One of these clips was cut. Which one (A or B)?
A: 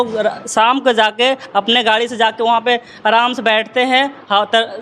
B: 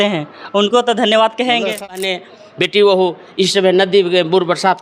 B